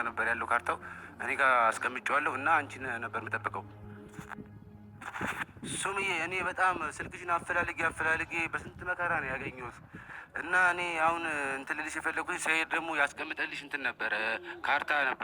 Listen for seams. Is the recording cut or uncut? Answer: uncut